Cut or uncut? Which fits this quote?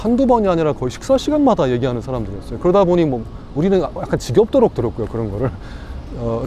uncut